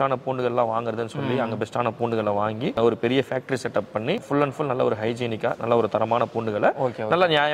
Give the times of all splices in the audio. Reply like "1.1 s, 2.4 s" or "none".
2.8 s, 4.2 s

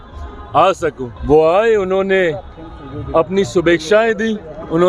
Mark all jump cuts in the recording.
1.1 s

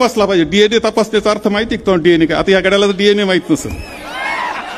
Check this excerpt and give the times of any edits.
none

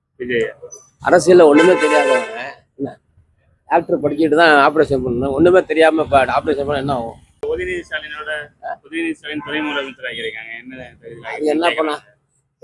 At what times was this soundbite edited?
7.4 s

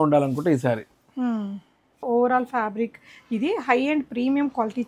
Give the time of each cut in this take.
2.0 s

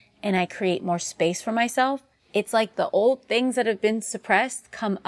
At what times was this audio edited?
2.1 s

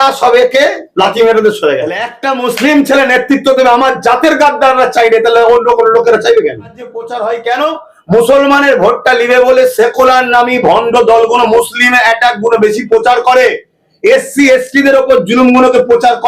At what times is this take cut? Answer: 2.1 s, 7.0 s

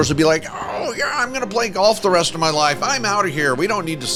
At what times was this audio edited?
none

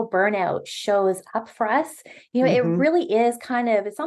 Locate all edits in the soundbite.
none

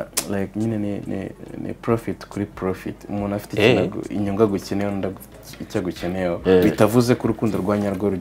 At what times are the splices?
6.4 s

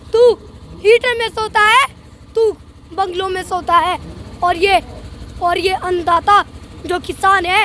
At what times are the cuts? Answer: none

